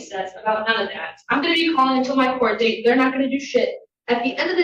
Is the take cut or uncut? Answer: uncut